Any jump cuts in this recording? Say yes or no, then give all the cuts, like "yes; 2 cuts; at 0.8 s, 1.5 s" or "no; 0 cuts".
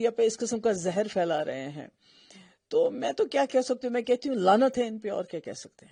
no; 0 cuts